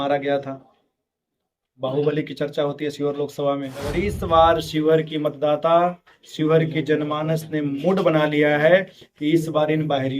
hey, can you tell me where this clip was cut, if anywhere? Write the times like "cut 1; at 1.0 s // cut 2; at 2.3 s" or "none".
cut 1; at 4.1 s